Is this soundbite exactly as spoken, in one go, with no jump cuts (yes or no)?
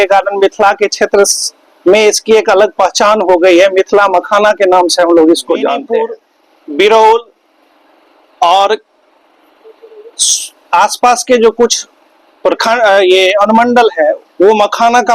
yes